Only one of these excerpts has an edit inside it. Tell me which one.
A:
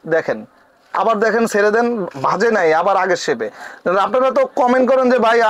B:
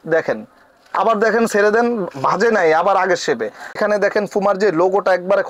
B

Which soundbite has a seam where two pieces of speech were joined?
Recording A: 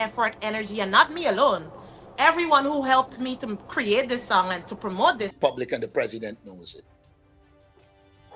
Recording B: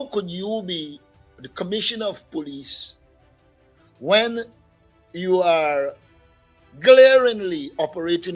A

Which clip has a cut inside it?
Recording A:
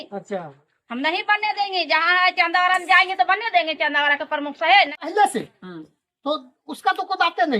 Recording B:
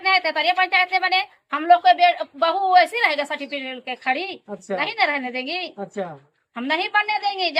A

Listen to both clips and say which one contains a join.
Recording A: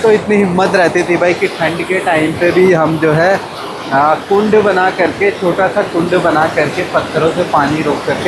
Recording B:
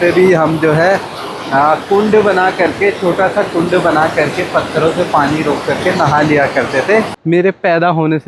B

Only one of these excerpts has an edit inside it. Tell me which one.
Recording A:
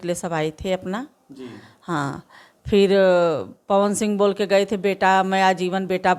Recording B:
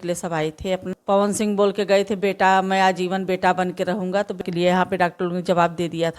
B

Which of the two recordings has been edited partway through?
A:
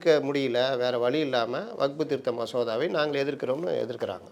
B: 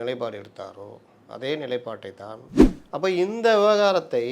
B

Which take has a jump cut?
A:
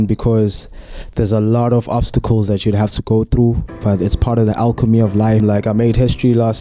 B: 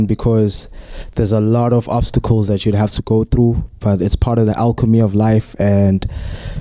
A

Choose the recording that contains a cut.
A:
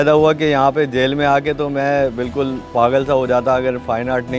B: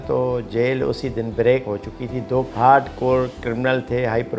B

